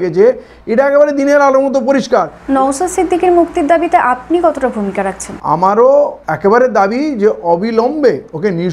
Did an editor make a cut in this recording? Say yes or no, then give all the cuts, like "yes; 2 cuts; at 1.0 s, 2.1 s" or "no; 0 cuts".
yes; 2 cuts; at 2.4 s, 5.4 s